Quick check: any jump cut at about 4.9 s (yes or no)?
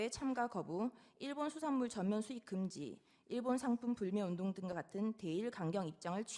no